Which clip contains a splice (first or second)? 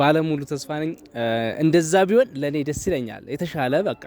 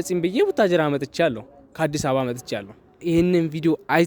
second